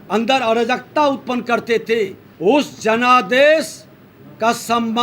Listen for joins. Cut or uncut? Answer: cut